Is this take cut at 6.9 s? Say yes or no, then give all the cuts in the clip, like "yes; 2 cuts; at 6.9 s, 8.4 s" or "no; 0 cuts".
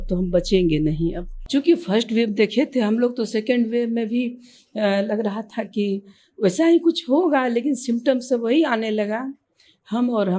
no; 1 cut; at 1.3 s